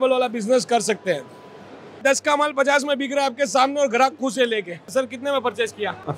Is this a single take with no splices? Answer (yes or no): no